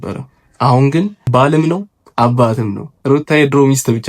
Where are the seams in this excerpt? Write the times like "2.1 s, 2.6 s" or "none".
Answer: 1.2 s, 2.0 s